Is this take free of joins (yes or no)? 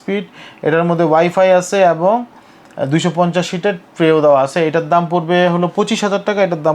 yes